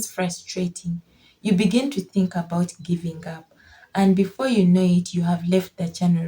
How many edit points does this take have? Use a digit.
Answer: 0